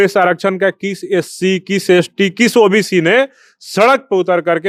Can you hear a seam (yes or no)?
no